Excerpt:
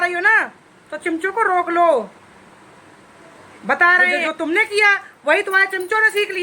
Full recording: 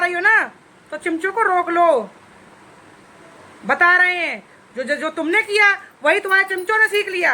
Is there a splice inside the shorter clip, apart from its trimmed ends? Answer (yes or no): yes